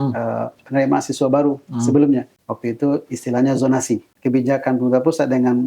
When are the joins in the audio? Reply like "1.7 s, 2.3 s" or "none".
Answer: 2.4 s, 4.1 s